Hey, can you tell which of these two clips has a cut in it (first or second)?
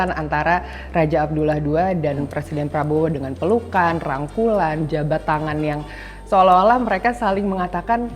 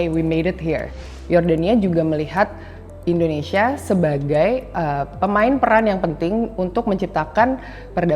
second